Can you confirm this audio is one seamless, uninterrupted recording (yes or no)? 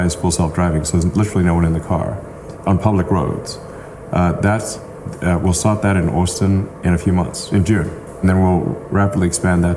yes